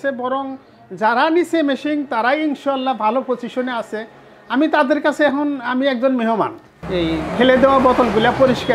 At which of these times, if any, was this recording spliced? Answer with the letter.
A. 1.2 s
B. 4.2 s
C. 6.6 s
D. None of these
C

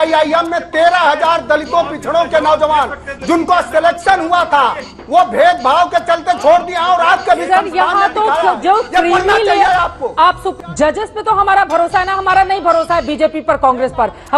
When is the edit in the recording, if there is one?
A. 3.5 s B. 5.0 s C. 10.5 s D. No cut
C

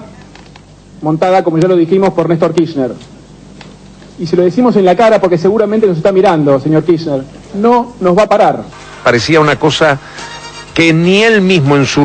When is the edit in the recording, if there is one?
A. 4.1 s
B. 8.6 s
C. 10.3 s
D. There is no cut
B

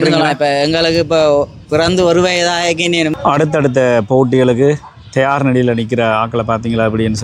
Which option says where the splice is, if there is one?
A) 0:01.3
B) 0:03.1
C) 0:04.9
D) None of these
B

